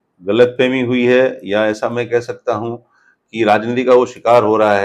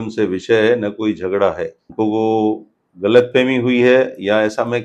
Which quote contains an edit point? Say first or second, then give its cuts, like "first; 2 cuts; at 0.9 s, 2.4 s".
second; 1 cut; at 1.8 s